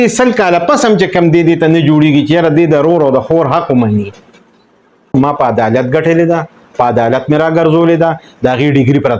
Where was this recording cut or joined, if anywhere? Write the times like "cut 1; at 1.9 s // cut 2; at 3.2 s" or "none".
cut 1; at 5.1 s